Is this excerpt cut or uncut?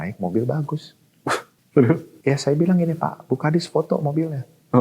cut